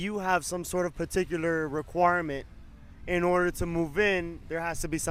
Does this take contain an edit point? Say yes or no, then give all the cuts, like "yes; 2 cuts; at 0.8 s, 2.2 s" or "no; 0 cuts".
no; 0 cuts